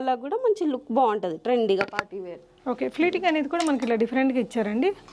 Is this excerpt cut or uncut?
uncut